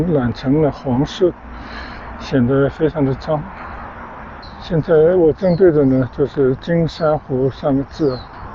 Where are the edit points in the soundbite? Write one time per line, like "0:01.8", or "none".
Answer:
0:04.5